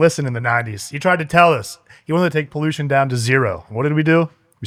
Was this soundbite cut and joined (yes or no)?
no